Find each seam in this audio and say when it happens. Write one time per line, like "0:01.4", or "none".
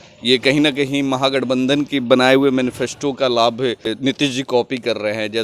0:03.9

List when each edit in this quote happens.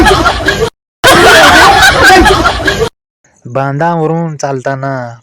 0:01.1
0:03.0

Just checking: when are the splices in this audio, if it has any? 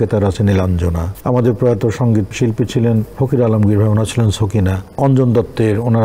0:01.1
0:02.3
0:03.1
0:04.9

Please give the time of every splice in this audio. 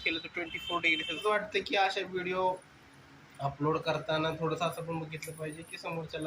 0:01.2

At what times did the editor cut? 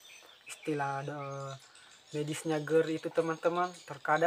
none

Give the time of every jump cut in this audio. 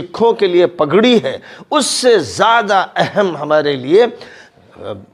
none

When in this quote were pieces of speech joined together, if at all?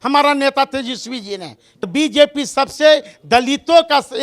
0:01.9

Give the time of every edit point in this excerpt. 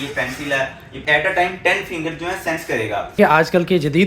0:01.0
0:03.2

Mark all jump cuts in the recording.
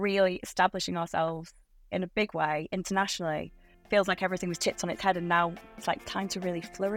0:03.7
0:05.8

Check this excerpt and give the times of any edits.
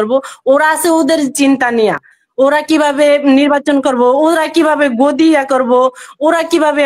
none

